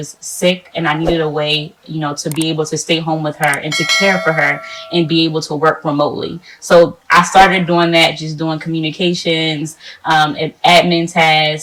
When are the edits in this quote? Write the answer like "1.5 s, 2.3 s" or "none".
none

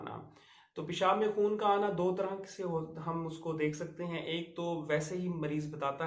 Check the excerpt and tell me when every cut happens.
none

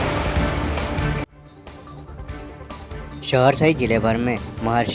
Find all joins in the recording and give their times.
1.4 s, 3.4 s

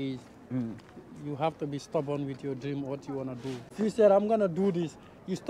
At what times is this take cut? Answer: 3.7 s

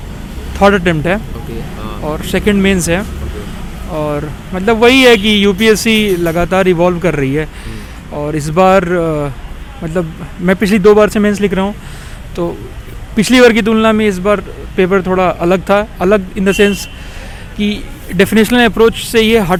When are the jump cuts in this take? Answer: none

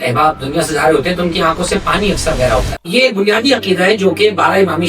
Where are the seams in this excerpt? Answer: 2.8 s

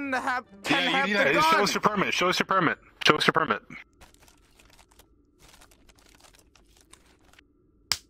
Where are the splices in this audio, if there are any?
none

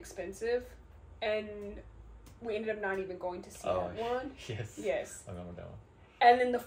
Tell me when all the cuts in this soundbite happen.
none

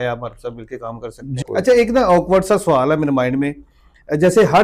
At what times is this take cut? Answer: 1.4 s

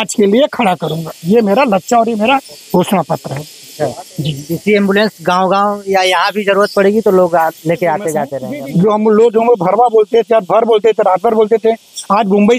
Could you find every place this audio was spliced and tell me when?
8.4 s

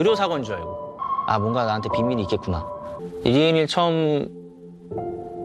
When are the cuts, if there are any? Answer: 1.1 s, 3.0 s

